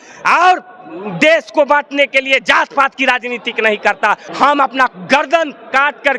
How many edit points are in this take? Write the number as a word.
one